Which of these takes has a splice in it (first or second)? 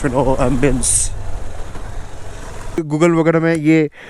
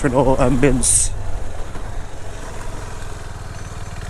first